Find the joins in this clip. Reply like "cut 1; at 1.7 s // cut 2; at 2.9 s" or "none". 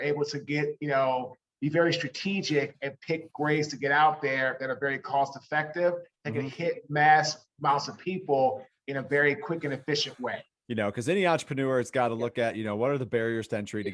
cut 1; at 10.5 s